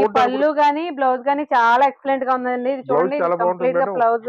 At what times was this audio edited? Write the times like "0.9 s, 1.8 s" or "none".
none

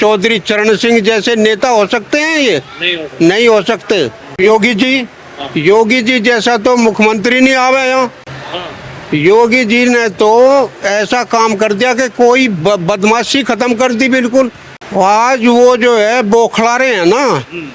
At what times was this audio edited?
4.4 s, 14.6 s

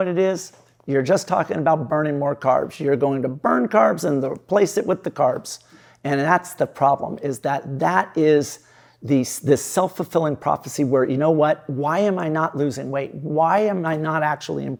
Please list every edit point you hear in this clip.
none

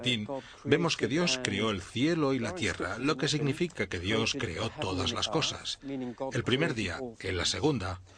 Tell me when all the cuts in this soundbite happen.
6.4 s

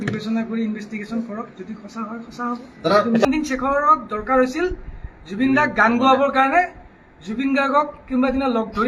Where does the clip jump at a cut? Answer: 3.3 s

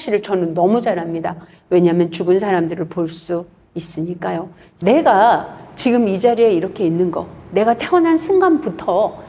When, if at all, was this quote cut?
4.6 s

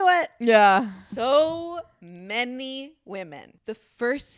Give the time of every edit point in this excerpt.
3.4 s

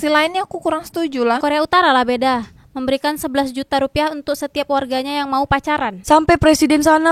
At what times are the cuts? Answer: 1.4 s, 6.0 s

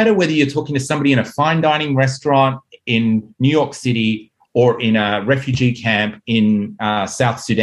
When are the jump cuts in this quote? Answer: none

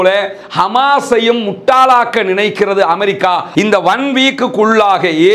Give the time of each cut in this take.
3.5 s

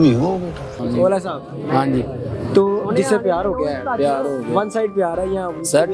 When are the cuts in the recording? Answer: none

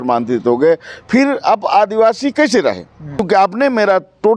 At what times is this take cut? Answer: 3.2 s

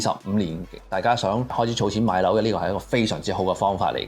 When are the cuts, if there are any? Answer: 1.5 s

